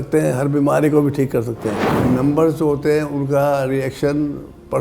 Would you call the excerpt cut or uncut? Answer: cut